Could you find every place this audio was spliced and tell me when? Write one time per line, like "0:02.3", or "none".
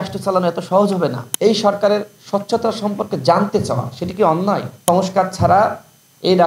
0:01.2
0:04.7

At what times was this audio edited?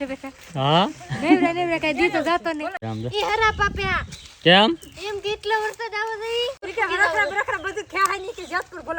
0:02.8
0:06.6

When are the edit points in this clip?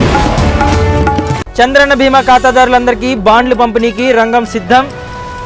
0:01.3

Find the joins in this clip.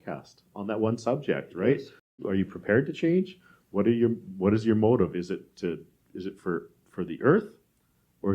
0:02.2

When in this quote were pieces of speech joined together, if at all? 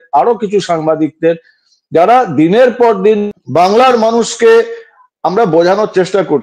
none

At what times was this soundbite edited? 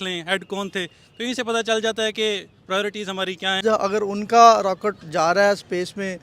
0:03.6

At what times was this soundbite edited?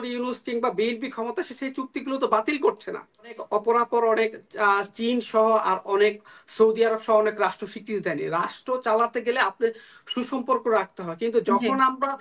0:03.4

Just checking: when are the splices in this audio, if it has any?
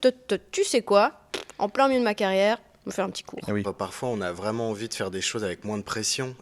0:03.6

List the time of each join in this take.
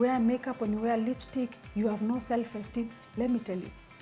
none

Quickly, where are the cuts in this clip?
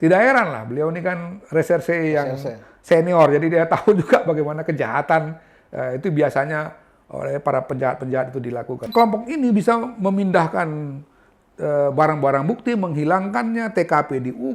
0:08.9

